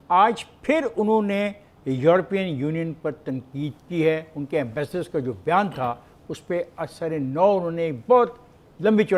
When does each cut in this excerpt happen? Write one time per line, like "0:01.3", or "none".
none